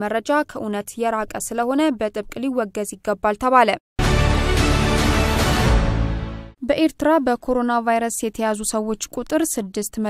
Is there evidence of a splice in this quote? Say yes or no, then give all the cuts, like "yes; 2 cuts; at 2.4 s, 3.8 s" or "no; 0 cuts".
yes; 1 cut; at 4.0 s